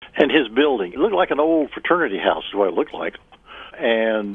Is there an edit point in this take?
yes; 1 cut; at 0.9 s

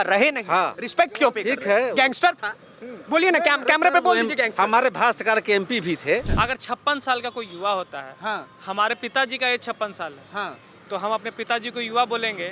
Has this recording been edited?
yes; 1 cut; at 6.3 s

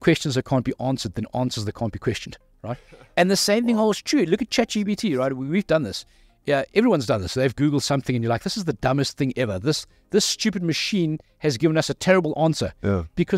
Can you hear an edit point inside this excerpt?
no; 0 cuts

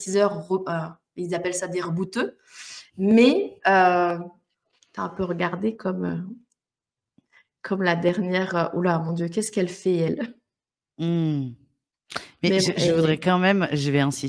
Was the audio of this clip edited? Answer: no; 0 cuts

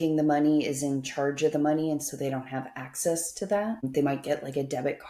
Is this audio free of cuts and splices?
no; 1 cut; at 3.9 s

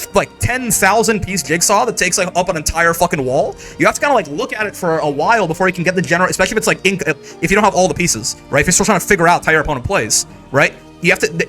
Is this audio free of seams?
yes; 0 cuts

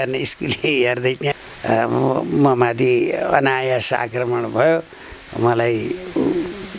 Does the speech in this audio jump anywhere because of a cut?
yes; 1 cut; at 1.3 s

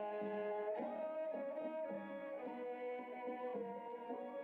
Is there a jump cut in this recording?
no; 0 cuts

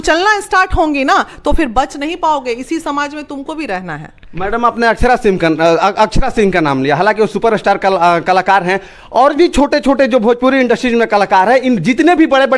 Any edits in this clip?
no; 0 cuts

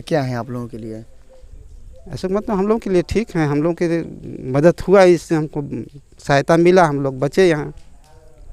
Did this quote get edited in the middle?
no; 0 cuts

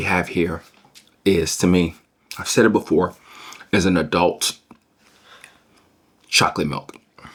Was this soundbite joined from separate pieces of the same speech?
no; 0 cuts

